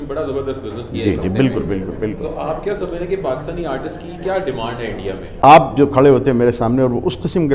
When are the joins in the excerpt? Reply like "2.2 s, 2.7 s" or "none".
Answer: 5.4 s